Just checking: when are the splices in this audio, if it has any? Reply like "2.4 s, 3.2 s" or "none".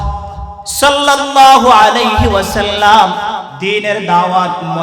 3.5 s

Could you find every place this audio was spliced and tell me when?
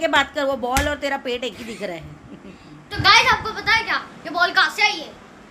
2.7 s

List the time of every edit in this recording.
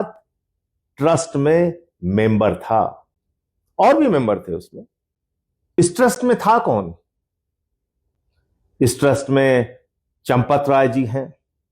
5.8 s

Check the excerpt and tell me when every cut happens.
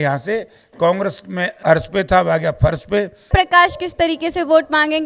1.5 s, 3.3 s

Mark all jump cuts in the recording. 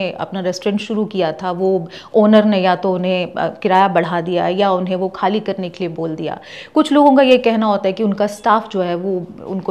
none

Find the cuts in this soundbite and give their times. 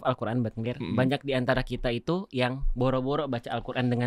none

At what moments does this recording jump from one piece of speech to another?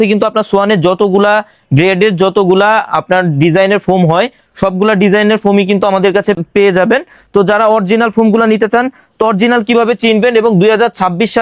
none

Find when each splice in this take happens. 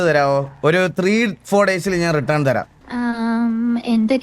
2.8 s

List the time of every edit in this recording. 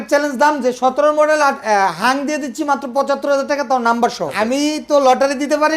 4.3 s

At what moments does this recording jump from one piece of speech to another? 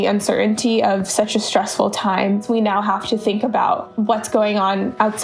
2.4 s

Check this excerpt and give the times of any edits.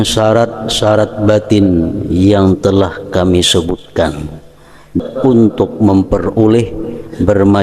5.0 s

